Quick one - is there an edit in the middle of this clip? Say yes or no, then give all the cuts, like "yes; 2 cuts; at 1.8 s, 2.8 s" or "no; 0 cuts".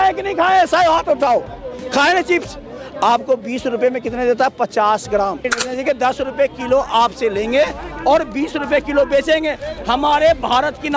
yes; 1 cut; at 5.6 s